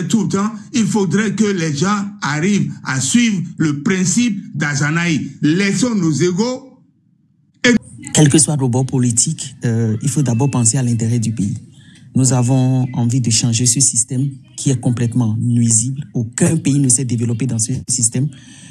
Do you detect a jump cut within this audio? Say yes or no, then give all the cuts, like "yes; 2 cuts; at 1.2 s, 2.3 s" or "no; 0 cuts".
yes; 1 cut; at 7.8 s